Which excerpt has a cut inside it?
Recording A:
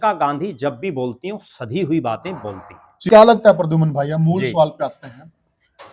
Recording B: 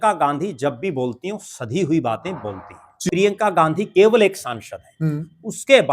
B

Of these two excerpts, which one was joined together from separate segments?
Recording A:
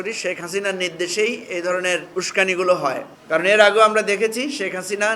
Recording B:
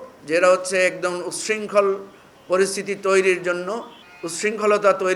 A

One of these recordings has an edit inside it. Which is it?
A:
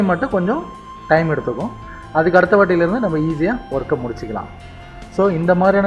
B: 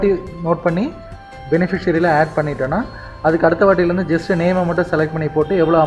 B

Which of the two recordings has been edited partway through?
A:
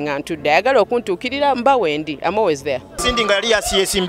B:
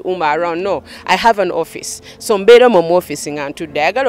A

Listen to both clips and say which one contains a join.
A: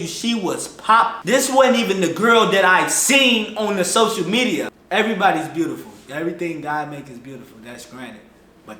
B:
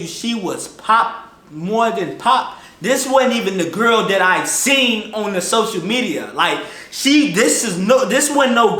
A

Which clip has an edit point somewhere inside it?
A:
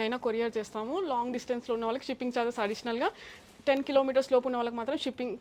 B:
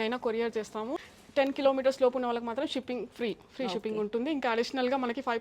B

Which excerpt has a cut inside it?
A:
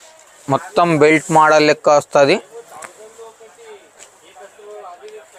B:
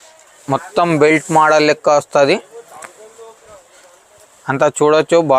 B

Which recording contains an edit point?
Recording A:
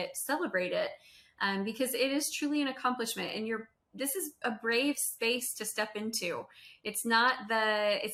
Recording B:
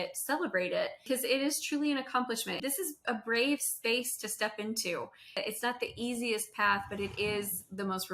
B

